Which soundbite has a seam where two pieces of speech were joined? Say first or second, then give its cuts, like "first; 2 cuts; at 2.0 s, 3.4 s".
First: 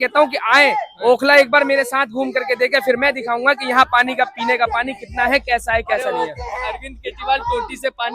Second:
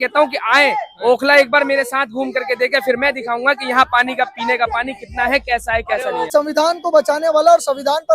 second; 1 cut; at 6.3 s